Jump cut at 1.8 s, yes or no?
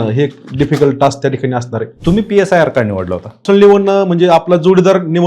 yes